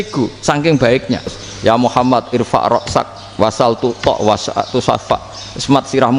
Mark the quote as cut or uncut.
cut